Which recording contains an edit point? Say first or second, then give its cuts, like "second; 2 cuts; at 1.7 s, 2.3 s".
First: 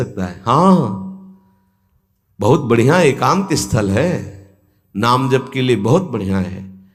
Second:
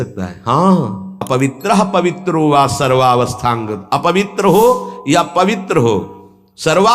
second; 1 cut; at 1.1 s